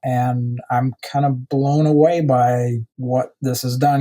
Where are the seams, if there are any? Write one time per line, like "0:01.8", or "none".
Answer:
0:02.9